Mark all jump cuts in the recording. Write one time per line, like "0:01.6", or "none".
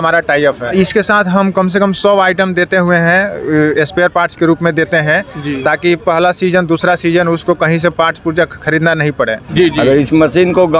0:00.7
0:09.4